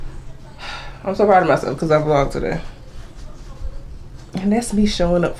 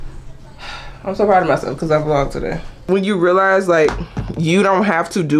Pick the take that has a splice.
second; 1 cut; at 2.8 s

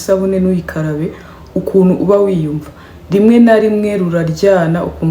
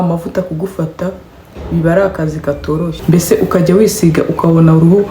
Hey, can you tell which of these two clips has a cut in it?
second; 1 cut; at 2.9 s

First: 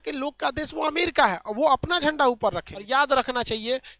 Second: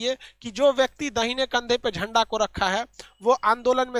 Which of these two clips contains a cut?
first; 1 cut; at 2.7 s

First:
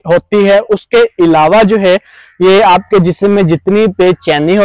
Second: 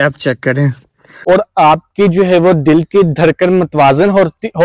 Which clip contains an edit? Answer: second; 1 cut; at 1.1 s

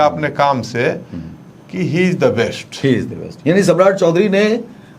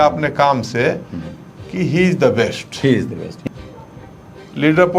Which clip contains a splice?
second; 1 cut; at 3.3 s

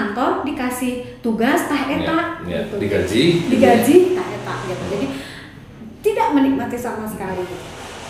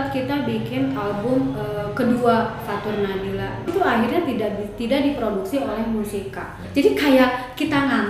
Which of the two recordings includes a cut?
second; 2 cuts; at 3.7 s, 6.6 s

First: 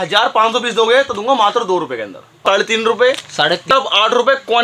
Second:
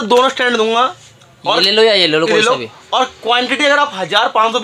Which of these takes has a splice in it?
first; 2 cuts; at 2.4 s, 3.7 s

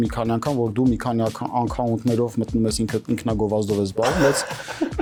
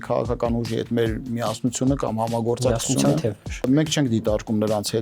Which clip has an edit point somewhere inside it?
second; 1 cut; at 3.7 s

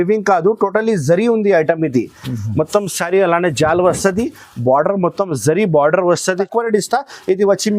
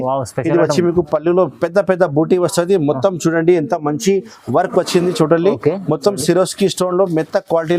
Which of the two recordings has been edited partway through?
first; 1 cut; at 6.4 s

